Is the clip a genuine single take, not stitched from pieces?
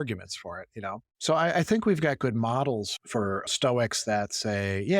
no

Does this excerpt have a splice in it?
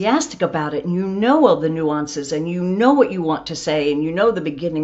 no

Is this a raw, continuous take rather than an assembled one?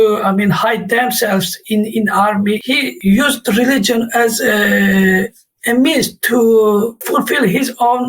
no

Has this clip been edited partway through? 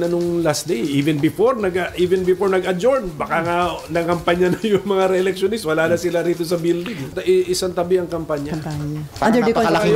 yes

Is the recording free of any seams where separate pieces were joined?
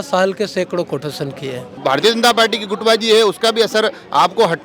no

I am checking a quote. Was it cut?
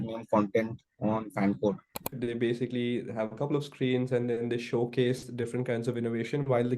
yes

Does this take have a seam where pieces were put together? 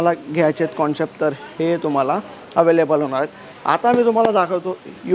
no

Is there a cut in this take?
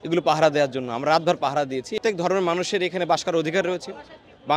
yes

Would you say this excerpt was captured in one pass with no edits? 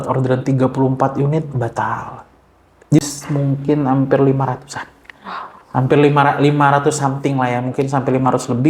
no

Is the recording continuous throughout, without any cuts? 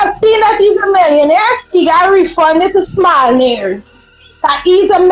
yes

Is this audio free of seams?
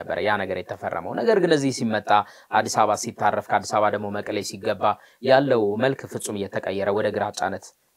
yes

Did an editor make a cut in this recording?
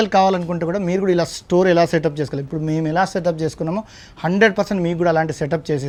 no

